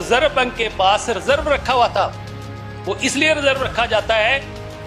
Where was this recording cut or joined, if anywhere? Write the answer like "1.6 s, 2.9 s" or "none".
none